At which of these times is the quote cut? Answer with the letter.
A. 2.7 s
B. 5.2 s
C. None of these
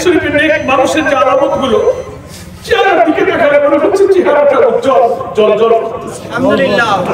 C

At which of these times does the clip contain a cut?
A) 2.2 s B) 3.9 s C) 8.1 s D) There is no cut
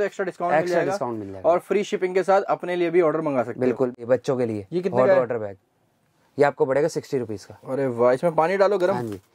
B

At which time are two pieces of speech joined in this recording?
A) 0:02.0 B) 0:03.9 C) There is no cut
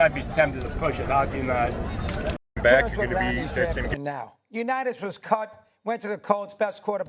B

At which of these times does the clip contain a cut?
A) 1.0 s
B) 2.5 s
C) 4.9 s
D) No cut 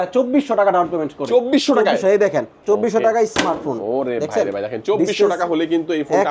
B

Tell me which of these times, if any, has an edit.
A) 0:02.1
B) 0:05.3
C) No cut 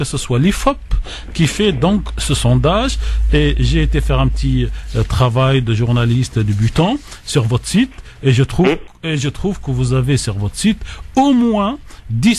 A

